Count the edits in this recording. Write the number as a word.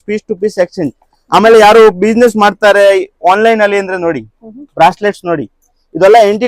zero